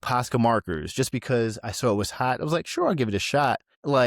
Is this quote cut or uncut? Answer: uncut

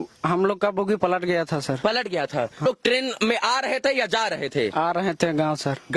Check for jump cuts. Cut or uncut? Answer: cut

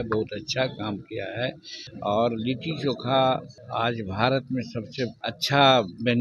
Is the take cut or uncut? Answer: cut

